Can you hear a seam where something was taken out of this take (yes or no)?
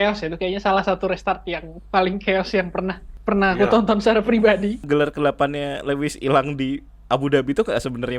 yes